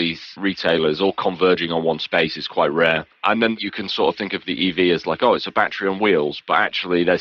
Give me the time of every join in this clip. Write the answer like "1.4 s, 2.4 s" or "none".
none